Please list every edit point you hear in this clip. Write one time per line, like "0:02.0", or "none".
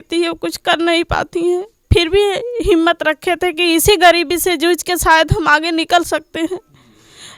none